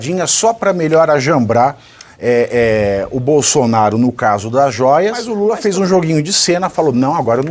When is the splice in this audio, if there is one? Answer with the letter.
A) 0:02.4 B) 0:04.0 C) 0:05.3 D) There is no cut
C